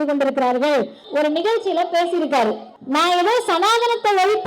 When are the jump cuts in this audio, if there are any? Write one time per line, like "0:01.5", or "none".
0:01.0
0:02.7